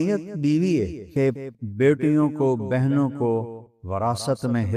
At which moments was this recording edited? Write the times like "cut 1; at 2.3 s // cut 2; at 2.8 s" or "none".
cut 1; at 1.3 s